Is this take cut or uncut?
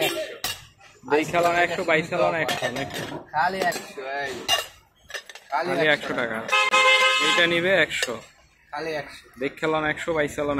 uncut